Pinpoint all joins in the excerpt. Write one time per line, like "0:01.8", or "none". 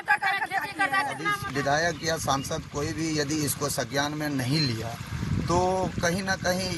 0:01.3